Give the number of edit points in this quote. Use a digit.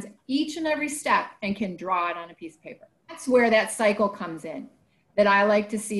1